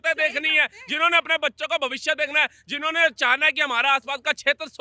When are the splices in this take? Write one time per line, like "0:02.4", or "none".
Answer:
none